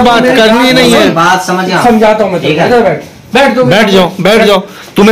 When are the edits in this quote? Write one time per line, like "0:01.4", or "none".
none